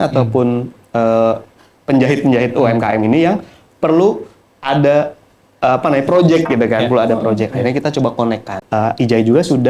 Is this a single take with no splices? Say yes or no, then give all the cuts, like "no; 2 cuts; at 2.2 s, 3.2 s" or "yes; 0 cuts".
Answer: no; 1 cut; at 8.5 s